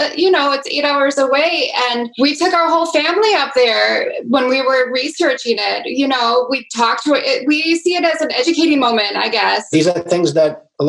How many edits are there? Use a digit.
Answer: 3